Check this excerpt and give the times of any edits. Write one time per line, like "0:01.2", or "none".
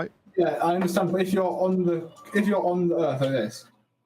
none